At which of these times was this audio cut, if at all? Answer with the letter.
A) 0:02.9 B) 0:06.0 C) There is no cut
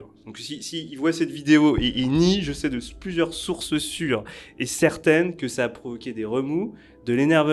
C